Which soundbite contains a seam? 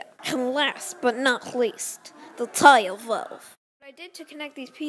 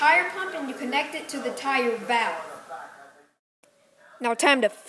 first; 1 cut; at 3.6 s

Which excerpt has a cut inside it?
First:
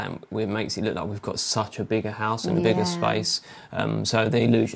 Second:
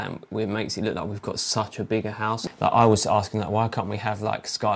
second; 1 cut; at 2.4 s

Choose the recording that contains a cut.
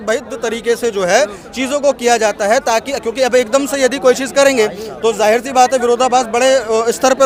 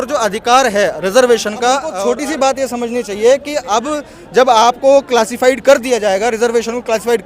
second; 1 cut; at 1.9 s

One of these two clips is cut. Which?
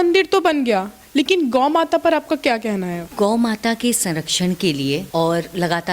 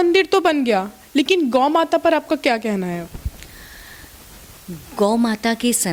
first; 2 cuts; at 3.1 s, 5.1 s

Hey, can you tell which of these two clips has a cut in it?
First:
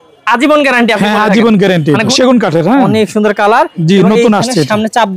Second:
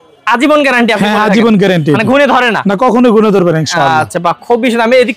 first; 1 cut; at 2.1 s

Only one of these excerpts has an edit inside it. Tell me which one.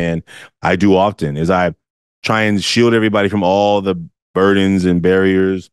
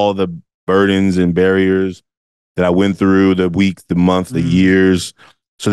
second; 1 cut; at 4.3 s

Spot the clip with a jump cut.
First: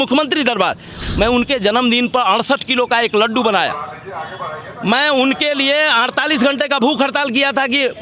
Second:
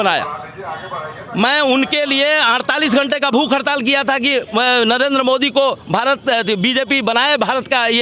first; 1 cut; at 0.9 s

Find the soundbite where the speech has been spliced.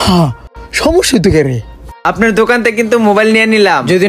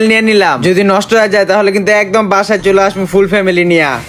first; 1 cut; at 2.0 s

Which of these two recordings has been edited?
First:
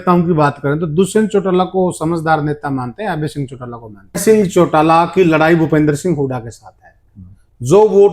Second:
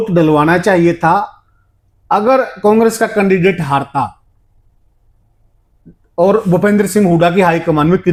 first; 1 cut; at 4.2 s

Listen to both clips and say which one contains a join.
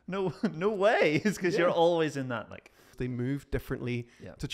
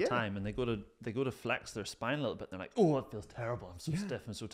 first; 1 cut; at 2.8 s

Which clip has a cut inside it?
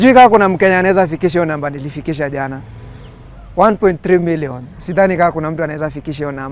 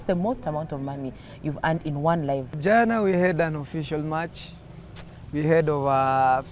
second; 1 cut; at 2.5 s

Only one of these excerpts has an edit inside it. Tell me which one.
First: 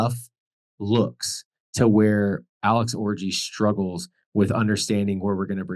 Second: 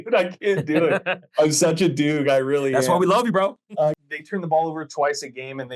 second; 1 cut; at 4.0 s

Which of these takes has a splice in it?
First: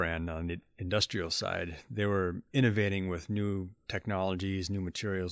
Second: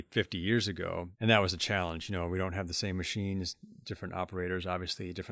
second; 1 cut; at 1.1 s

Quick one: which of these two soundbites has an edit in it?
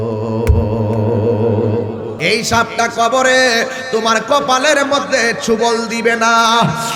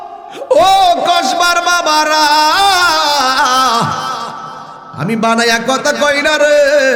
first; 1 cut; at 2.1 s

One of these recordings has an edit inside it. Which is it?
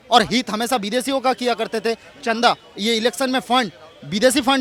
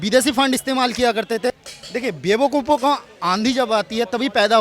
second; 1 cut; at 1.5 s

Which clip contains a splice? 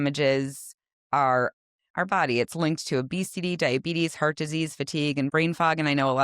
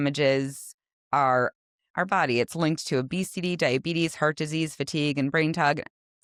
first; 1 cut; at 5.3 s

